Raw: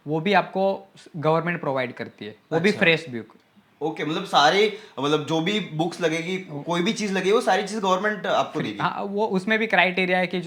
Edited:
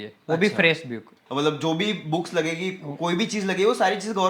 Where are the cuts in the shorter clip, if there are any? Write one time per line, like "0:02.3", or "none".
0:01.2